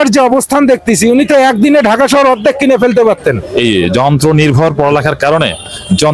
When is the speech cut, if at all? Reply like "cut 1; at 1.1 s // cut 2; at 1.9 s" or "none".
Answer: cut 1; at 3.4 s